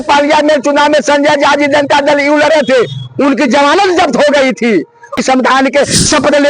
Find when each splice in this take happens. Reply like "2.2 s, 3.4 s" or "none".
5.2 s